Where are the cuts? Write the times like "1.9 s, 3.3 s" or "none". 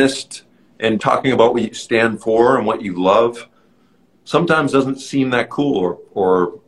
1.0 s